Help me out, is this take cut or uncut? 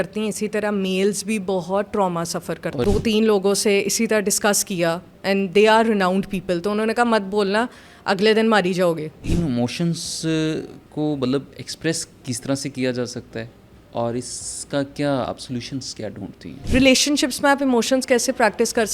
cut